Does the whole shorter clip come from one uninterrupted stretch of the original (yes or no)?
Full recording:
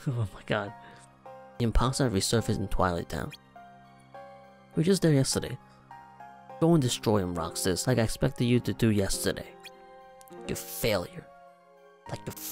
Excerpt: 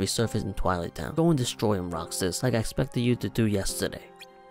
no